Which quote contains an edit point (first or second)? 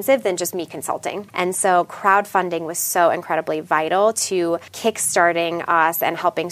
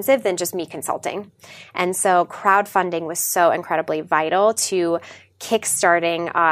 first